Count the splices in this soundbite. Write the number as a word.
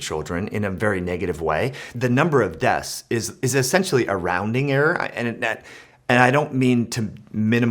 one